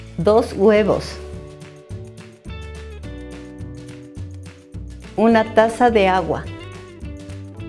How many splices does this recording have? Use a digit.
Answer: 0